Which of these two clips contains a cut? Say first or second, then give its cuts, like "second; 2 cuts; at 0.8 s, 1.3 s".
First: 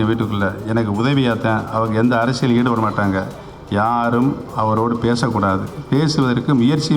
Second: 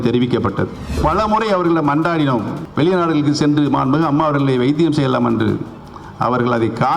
second; 2 cuts; at 1.0 s, 2.6 s